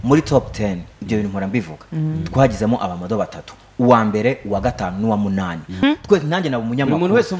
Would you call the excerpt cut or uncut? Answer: cut